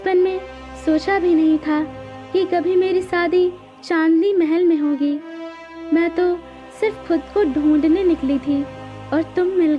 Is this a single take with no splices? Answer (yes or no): yes